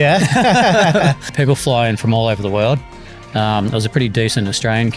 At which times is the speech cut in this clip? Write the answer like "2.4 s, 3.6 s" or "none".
1.3 s